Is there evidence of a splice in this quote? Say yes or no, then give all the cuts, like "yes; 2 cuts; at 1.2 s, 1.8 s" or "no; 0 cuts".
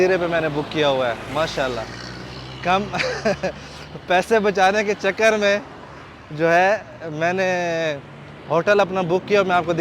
no; 0 cuts